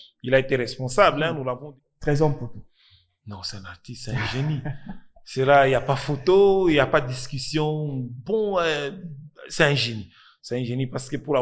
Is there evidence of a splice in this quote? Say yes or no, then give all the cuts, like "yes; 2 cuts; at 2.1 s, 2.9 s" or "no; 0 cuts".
yes; 1 cut; at 1.5 s